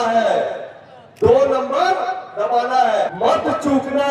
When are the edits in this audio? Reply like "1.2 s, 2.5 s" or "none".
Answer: 3.1 s